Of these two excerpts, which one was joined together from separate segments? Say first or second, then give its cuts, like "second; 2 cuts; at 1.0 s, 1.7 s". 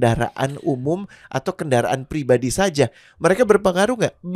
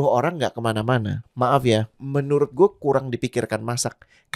second; 2 cuts; at 1.2 s, 2.0 s